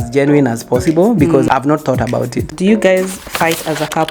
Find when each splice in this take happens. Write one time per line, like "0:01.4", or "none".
0:02.5